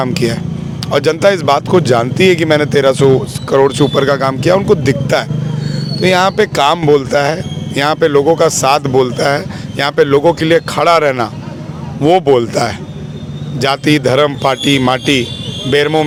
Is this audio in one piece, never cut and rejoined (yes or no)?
yes